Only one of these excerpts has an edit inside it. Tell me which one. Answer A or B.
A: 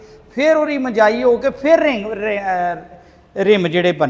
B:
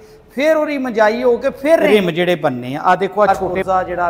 B